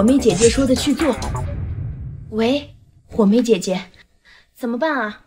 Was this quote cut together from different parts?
no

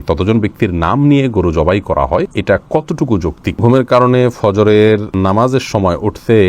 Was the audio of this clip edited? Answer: yes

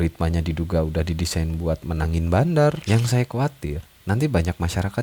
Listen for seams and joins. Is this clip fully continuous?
no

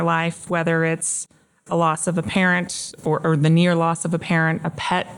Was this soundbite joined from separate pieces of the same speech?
no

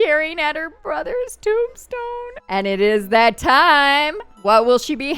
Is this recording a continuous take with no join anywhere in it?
no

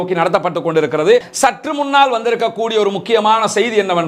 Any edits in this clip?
yes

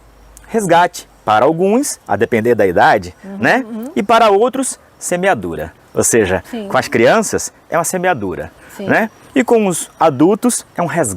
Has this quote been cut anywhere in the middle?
no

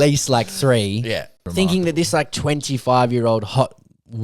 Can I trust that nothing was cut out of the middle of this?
no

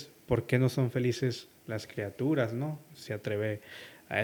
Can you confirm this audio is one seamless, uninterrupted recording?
yes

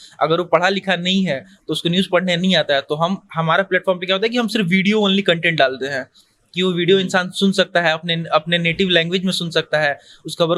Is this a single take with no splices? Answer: yes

